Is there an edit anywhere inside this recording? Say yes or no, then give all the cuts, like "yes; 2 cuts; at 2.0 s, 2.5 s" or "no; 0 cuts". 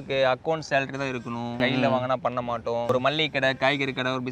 no; 0 cuts